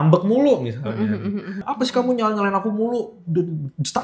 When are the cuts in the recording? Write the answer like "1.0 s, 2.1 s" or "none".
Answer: 1.7 s